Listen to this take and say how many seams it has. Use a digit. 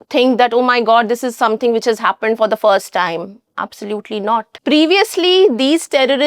1